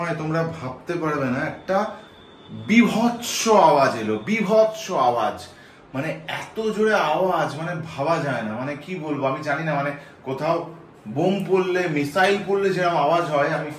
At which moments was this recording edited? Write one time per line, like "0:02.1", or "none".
none